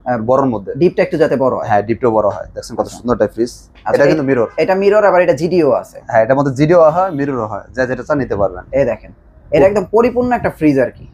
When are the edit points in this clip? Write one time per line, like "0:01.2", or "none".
none